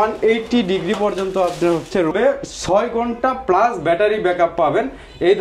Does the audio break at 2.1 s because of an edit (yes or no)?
yes